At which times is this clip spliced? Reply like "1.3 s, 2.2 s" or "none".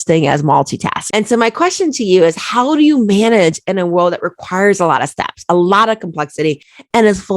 1.0 s

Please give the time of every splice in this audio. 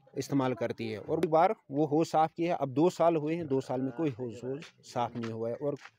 1.2 s

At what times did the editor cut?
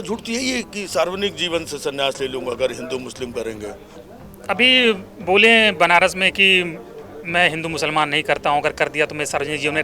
4.0 s

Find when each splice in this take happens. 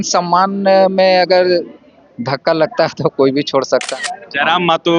3.9 s

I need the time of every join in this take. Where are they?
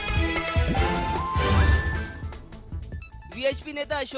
1.6 s

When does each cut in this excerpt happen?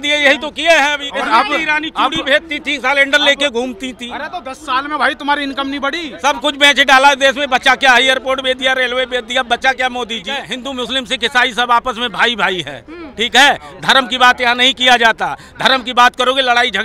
1.0 s, 6.1 s, 10.5 s

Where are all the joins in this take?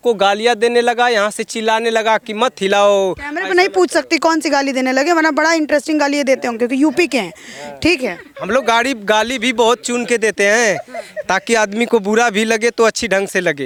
none

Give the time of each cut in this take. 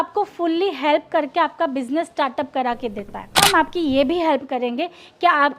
3.4 s

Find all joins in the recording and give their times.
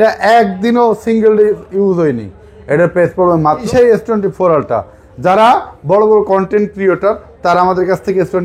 3.6 s

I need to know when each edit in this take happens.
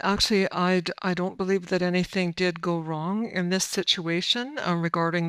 none

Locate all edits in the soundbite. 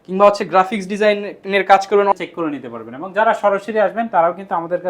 2.1 s

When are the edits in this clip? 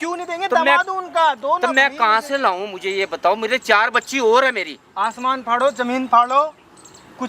none

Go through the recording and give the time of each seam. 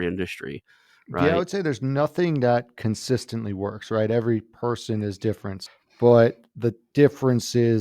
5.5 s

